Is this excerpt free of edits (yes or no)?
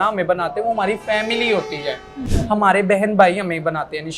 no